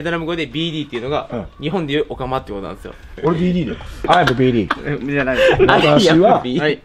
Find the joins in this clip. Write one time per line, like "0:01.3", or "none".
0:03.0
0:04.0